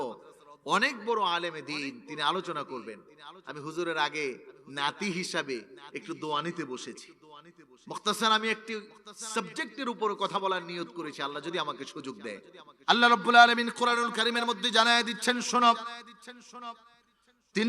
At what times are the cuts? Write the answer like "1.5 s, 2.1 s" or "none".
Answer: 12.5 s